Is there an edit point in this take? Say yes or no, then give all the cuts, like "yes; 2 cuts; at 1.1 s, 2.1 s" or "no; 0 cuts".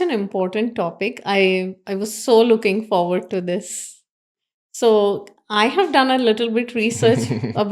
no; 0 cuts